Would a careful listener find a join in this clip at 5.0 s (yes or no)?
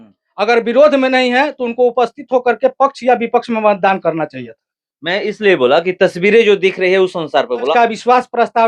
no